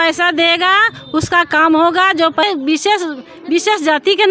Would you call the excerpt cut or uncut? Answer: cut